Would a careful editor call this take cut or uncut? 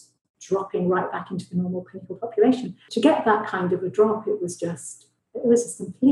cut